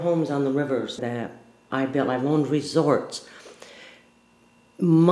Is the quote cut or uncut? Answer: cut